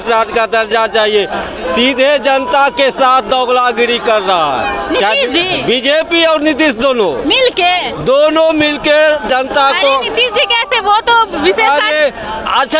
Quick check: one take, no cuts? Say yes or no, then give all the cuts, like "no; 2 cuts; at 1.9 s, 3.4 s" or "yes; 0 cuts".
yes; 0 cuts